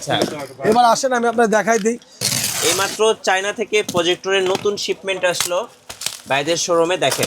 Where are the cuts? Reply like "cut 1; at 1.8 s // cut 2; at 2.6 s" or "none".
cut 1; at 2.2 s